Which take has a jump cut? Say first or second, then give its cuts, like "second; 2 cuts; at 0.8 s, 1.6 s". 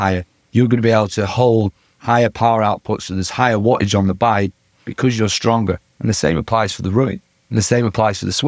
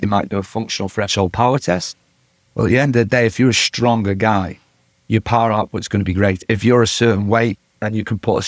second; 1 cut; at 6.4 s